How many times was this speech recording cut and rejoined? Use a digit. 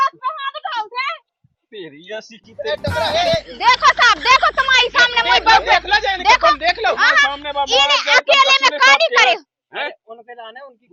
0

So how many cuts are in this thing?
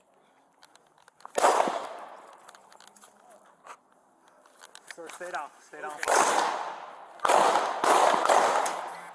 0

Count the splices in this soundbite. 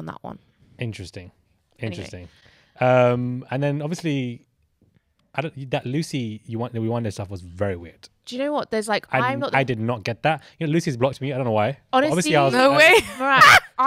0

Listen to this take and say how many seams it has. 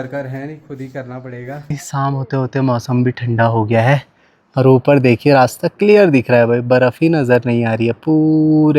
1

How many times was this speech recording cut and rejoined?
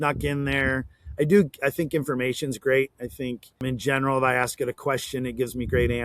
1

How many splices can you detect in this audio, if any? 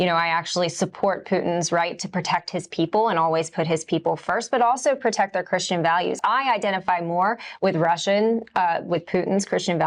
1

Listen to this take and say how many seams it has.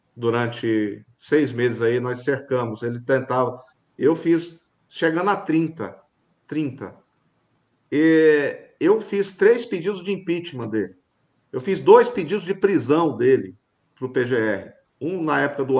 1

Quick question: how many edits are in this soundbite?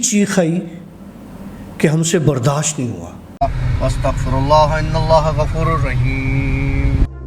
1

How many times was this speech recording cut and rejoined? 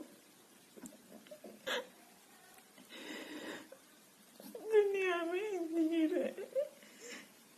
1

